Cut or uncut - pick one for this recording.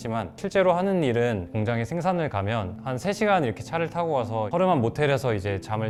uncut